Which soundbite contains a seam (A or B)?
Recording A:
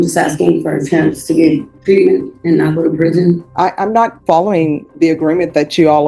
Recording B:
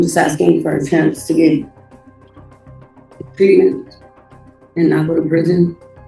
A